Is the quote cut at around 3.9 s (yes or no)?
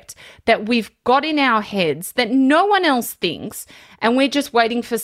no